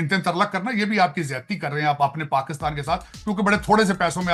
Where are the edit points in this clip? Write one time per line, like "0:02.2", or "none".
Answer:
none